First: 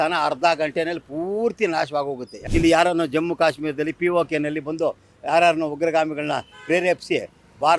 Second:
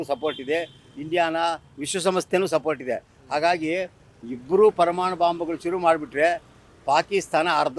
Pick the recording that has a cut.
first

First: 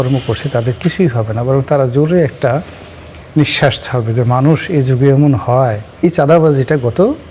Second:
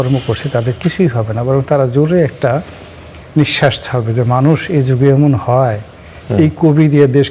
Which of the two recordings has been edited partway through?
first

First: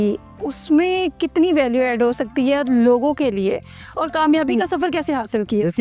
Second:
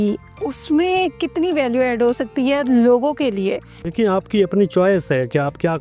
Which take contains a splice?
second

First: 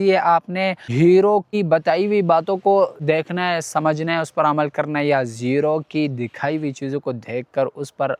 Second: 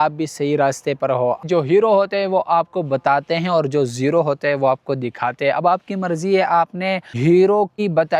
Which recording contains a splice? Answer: second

